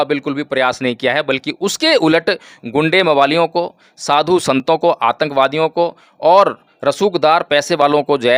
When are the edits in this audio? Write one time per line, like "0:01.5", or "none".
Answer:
none